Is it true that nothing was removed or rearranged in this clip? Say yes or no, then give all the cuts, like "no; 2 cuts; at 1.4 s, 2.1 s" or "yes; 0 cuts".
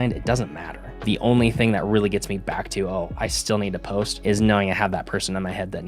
no; 2 cuts; at 0.9 s, 4.1 s